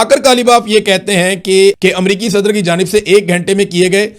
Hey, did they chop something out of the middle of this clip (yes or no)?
yes